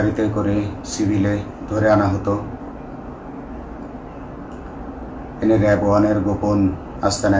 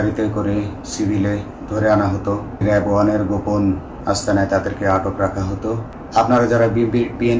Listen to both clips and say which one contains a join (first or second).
second